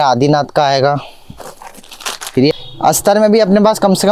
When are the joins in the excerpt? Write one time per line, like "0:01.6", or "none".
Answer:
0:02.5